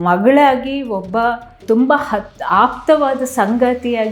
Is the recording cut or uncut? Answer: cut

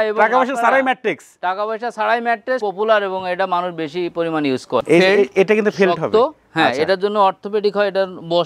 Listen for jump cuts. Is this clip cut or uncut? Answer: cut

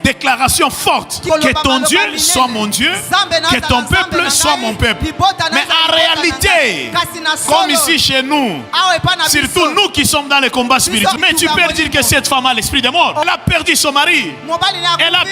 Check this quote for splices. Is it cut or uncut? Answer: cut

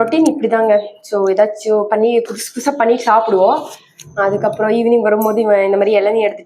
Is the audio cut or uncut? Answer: uncut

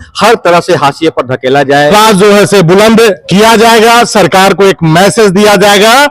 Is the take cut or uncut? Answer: cut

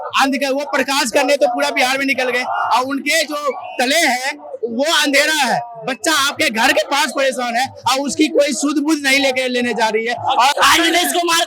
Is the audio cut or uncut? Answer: cut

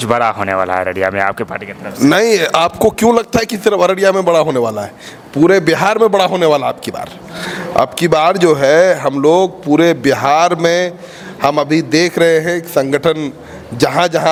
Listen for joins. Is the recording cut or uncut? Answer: uncut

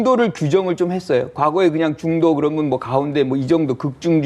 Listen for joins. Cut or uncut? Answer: uncut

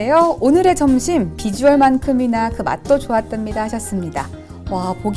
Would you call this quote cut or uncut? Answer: uncut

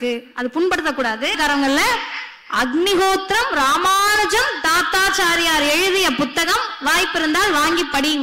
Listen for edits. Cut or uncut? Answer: uncut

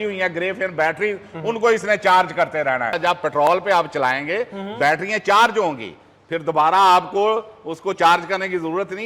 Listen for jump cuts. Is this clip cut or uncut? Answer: cut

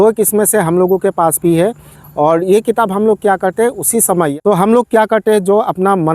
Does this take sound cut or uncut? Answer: cut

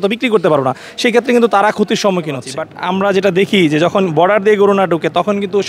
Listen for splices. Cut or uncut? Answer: cut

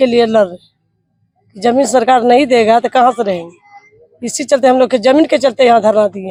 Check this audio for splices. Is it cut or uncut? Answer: uncut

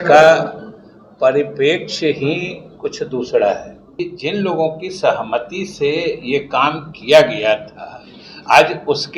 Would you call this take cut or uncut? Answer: cut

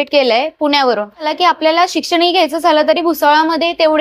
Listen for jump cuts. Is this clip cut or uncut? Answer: cut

